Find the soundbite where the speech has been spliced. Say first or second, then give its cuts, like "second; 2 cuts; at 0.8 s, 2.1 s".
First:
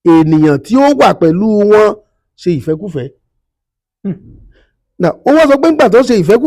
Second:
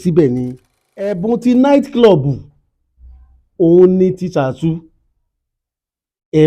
second; 1 cut; at 1.2 s